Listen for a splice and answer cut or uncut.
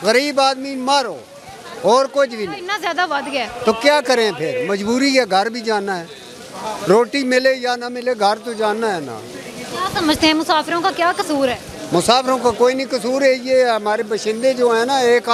uncut